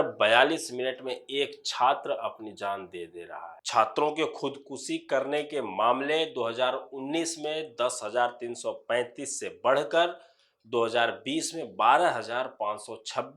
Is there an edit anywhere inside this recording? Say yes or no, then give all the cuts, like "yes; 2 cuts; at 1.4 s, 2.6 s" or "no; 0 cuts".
yes; 1 cut; at 3.6 s